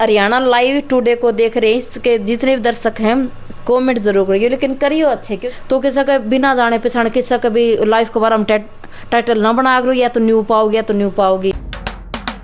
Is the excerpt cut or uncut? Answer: uncut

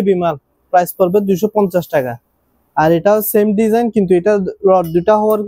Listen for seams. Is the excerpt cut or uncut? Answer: uncut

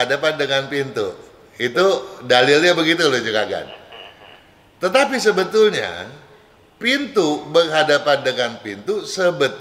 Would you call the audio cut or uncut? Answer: uncut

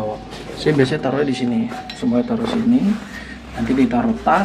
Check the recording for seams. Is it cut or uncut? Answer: uncut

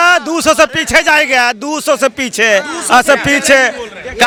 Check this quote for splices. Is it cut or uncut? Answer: uncut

